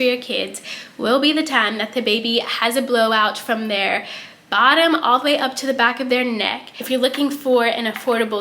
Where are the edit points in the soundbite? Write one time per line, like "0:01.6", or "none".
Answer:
0:06.7